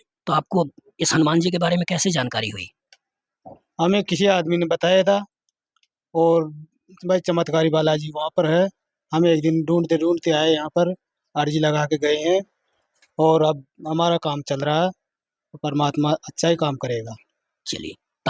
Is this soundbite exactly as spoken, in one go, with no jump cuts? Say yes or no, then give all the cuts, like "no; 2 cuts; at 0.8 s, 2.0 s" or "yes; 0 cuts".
yes; 0 cuts